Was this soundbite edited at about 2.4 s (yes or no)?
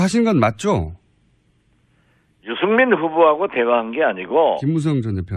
yes